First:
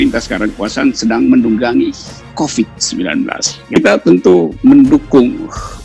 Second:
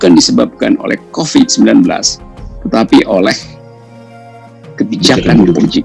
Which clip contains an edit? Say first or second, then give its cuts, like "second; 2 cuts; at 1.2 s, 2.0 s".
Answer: first; 1 cut; at 3.6 s